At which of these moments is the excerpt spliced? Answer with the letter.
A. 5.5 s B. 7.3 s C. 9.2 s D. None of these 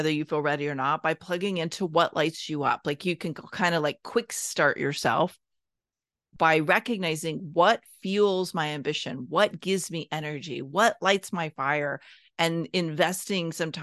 D